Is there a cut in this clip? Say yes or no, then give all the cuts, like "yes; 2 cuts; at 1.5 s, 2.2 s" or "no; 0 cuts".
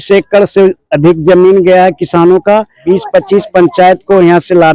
yes; 1 cut; at 2.7 s